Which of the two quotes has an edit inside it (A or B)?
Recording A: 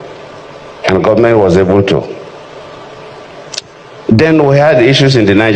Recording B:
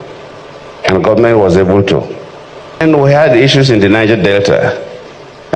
B